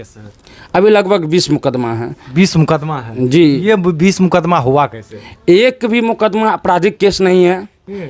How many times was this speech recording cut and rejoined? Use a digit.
0